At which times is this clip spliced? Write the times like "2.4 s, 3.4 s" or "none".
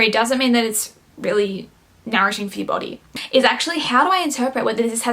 3.1 s